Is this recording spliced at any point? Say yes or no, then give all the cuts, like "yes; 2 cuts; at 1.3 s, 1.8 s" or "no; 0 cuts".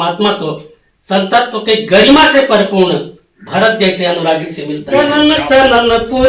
yes; 1 cut; at 4.8 s